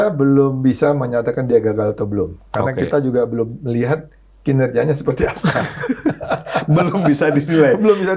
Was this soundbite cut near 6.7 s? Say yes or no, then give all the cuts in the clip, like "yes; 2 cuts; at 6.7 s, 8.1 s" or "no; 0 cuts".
no; 0 cuts